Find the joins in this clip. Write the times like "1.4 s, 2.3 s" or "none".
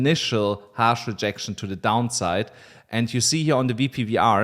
none